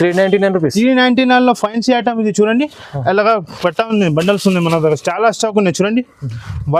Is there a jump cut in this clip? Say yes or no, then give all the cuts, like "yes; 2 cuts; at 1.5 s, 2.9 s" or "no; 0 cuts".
no; 0 cuts